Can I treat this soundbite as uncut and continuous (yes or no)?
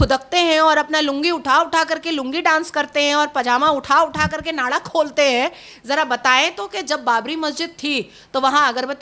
yes